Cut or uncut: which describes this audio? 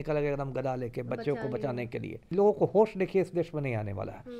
cut